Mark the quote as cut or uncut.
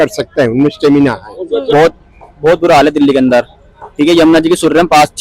cut